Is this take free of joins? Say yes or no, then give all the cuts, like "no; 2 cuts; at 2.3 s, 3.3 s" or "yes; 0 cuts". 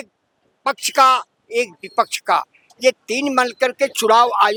yes; 0 cuts